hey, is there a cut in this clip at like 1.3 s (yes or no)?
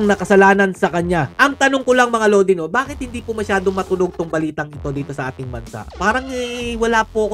yes